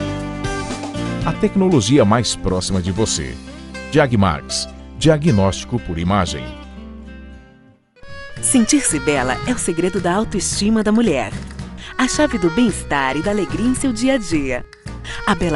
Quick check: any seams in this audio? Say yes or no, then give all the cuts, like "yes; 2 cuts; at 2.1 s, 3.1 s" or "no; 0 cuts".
yes; 1 cut; at 7.8 s